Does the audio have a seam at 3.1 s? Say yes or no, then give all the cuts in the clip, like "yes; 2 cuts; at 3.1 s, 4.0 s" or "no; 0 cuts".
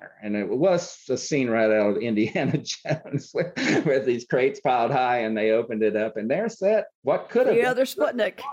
no; 1 cut; at 6.9 s